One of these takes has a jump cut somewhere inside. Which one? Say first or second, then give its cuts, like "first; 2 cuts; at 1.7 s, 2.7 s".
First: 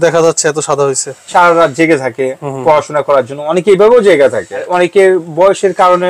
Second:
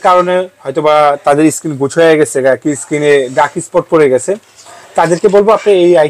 first; 2 cuts; at 1.1 s, 4.7 s